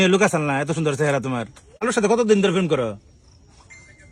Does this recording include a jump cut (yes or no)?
yes